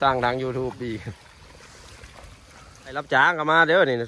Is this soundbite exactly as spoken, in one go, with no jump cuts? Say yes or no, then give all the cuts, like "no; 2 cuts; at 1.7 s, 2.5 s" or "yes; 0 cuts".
no; 1 cut; at 3.1 s